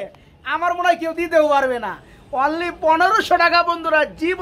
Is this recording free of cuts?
yes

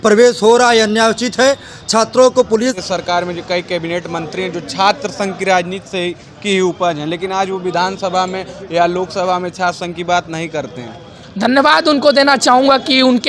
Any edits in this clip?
yes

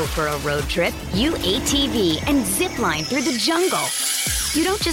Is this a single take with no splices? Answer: yes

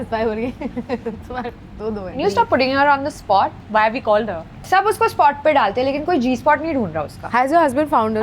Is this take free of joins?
no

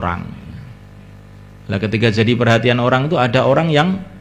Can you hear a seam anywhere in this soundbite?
no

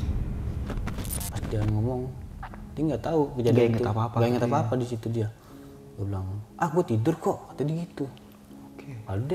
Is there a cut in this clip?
yes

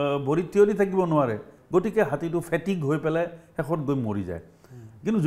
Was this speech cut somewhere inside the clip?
yes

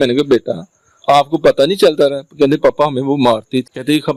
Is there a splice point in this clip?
no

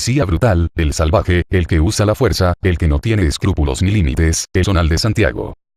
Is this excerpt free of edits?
yes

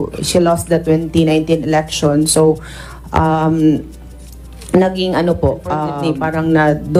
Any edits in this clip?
yes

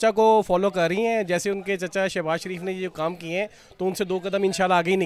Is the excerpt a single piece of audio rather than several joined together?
yes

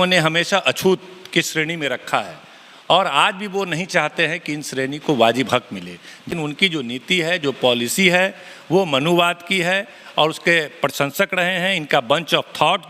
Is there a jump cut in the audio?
yes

